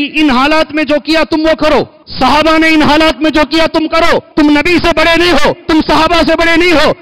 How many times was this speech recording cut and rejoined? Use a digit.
3